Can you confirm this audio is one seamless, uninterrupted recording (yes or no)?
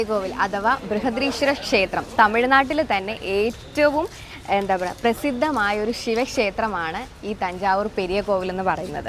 yes